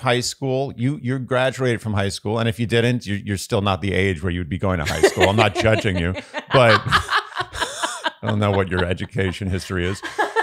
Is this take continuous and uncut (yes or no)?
yes